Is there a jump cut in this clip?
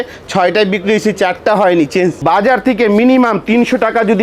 yes; 1 cut; at 2.2 s

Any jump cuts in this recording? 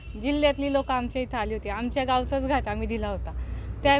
no; 0 cuts

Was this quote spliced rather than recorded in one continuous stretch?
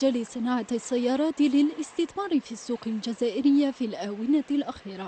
yes; 1 cut; at 1.0 s

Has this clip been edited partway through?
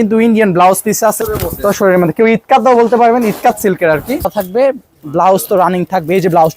yes; 2 cuts; at 1.2 s, 4.3 s

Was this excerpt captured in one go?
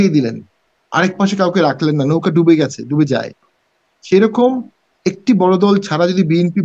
yes; 0 cuts

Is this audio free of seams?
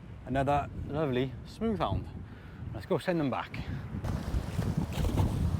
no; 1 cut; at 4.0 s

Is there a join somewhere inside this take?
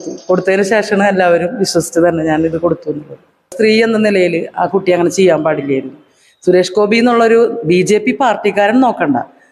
yes; 1 cut; at 3.5 s

